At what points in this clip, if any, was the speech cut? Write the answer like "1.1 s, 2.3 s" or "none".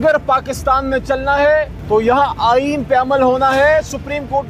1.8 s